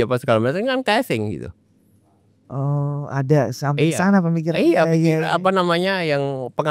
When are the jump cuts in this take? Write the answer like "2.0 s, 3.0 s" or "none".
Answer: none

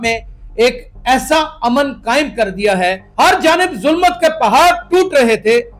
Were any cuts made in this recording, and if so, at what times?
3.0 s

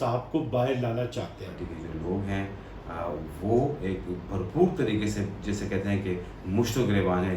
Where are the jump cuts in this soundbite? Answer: 1.7 s

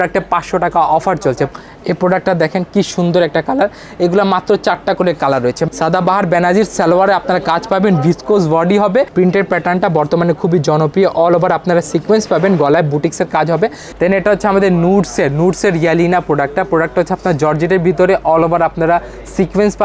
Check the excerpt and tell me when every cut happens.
1.5 s, 5.6 s, 9.1 s, 13.8 s

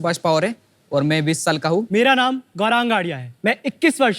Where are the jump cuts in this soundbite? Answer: 1.8 s, 3.2 s

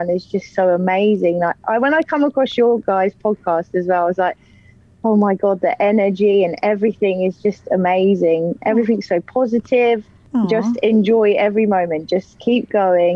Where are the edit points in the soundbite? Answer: 10.2 s

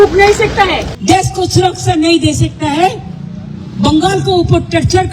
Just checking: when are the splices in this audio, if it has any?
0.9 s

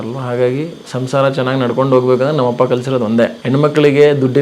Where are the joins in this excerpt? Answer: 3.4 s

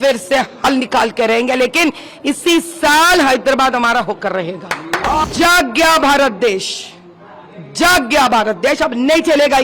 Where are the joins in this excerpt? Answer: 5.2 s

